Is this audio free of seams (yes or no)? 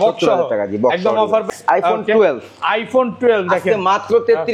no